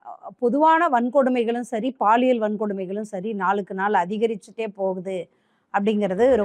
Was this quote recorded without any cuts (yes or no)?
yes